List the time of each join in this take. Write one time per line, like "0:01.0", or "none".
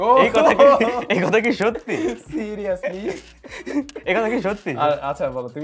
none